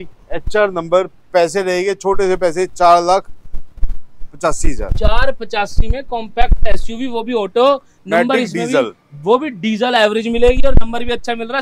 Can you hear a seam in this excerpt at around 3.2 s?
no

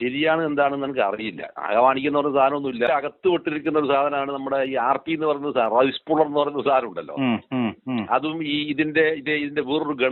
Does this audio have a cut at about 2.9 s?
yes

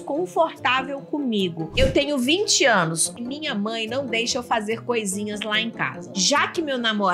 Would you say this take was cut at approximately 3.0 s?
yes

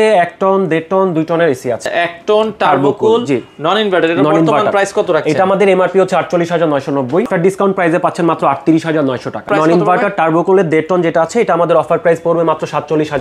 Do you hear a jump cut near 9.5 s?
yes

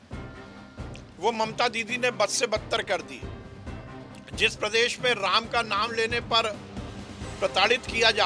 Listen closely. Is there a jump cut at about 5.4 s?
no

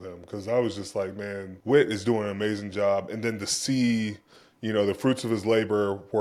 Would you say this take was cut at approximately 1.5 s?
yes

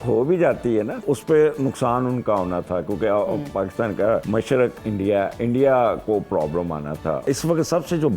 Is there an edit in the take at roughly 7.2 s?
yes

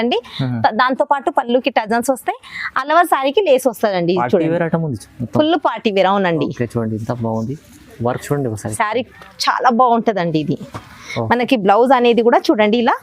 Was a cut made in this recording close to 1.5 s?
no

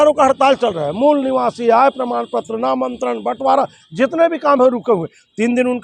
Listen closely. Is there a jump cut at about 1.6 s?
no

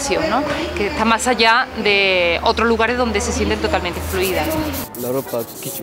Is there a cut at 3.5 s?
no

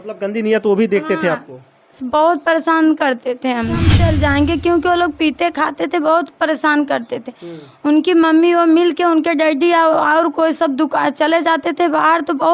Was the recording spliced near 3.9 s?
yes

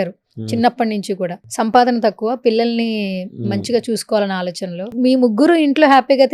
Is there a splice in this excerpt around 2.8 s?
no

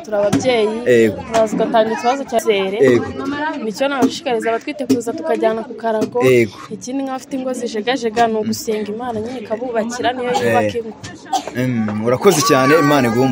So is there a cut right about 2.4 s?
yes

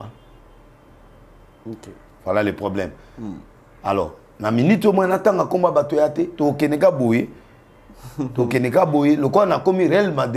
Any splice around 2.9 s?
no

